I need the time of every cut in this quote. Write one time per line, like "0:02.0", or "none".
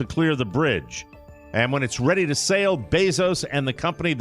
0:01.4